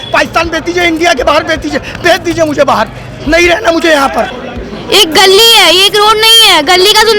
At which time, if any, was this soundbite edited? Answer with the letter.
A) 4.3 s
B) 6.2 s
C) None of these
A